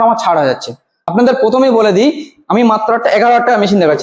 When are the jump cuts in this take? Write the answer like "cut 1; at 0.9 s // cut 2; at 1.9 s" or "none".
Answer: cut 1; at 1.0 s